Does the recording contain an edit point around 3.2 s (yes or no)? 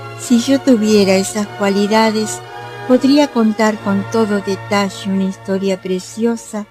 yes